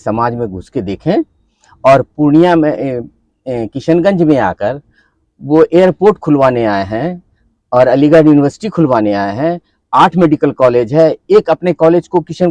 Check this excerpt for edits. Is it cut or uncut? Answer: uncut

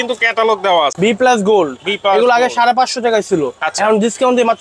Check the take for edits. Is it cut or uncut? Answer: cut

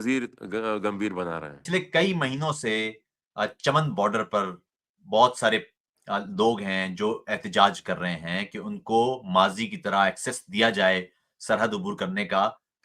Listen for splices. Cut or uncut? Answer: cut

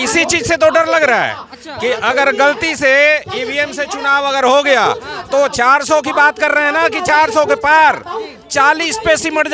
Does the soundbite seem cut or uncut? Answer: uncut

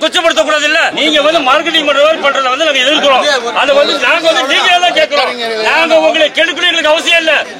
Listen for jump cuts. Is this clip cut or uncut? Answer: cut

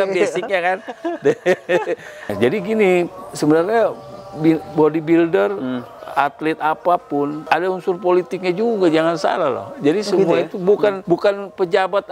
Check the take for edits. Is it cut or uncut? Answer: cut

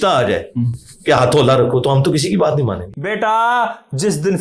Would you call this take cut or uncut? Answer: cut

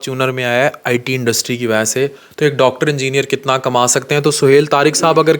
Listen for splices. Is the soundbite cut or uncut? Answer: uncut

